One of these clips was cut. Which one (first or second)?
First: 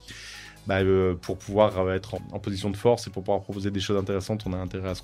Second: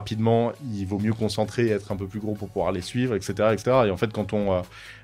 first